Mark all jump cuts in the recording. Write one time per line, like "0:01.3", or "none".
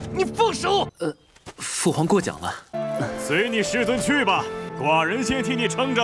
0:00.9